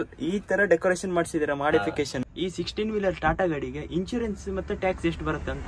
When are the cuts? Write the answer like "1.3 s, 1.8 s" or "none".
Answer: 2.2 s